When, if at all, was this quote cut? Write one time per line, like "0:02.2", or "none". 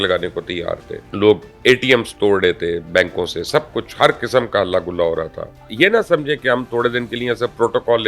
0:01.0
0:05.7